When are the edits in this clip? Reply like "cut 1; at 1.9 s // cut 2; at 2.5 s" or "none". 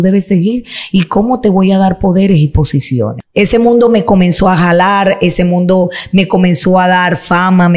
cut 1; at 3.2 s